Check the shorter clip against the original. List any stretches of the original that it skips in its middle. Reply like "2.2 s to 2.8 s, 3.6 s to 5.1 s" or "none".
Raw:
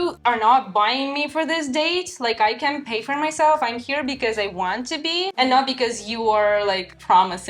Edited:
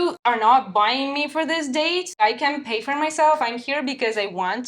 2.2 s to 2.4 s